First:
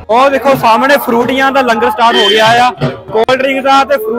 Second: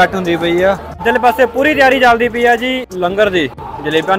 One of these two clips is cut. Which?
second; 2 cuts; at 1.0 s, 2.9 s

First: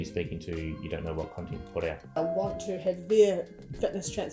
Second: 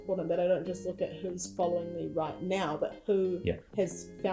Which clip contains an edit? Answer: first; 1 cut; at 2.2 s

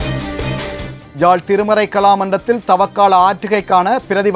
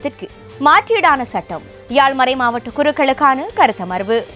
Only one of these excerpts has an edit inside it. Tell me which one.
first; 1 cut; at 1.0 s

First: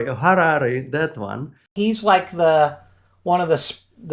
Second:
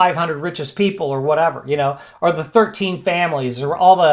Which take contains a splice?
first; 1 cut; at 1.7 s

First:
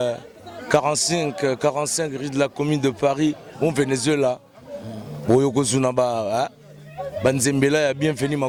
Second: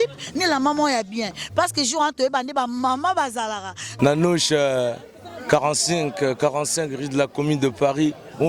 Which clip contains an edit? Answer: second; 1 cut; at 3.8 s

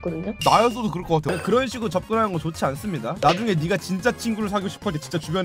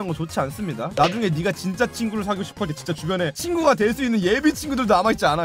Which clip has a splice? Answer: first; 1 cut; at 1.2 s

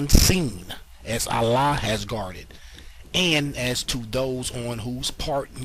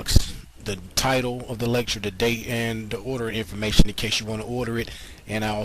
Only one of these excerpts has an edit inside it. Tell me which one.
second; 1 cut; at 1.5 s

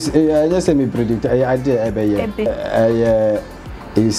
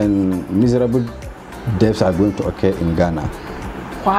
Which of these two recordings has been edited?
first; 1 cut; at 2.5 s

